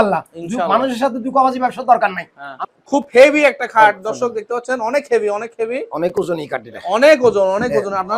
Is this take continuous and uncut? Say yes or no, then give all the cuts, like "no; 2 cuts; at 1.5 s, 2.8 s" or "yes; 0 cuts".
no; 1 cut; at 2.6 s